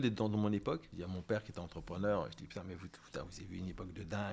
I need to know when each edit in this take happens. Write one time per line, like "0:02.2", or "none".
0:00.9